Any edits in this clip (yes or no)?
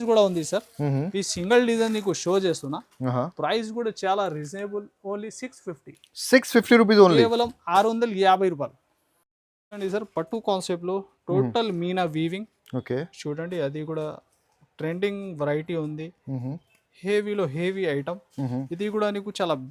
no